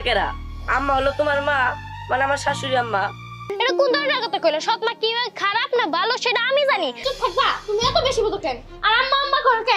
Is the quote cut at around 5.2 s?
no; 2 cuts; at 3.5 s, 7.0 s

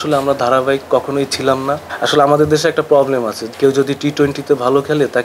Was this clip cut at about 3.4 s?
yes; 2 cuts; at 1.9 s, 3.4 s

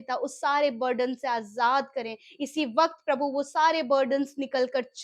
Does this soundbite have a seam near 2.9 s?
no; 0 cuts

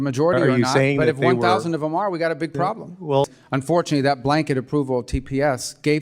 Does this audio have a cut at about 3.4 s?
yes; 1 cut; at 3.4 s

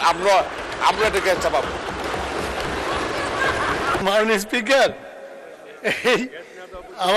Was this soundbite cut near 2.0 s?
no; 1 cut; at 4.0 s

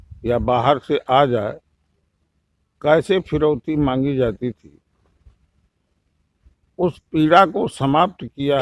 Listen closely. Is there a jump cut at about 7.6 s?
no; 0 cuts

